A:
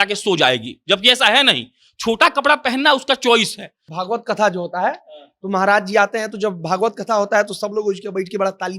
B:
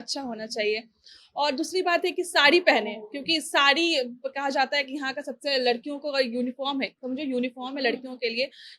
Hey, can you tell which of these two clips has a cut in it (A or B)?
A